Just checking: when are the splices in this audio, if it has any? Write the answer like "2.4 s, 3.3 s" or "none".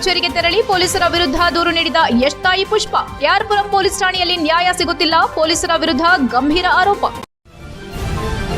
7.2 s